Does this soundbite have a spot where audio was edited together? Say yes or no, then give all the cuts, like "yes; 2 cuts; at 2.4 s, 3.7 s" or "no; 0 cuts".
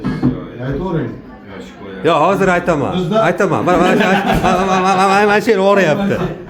no; 0 cuts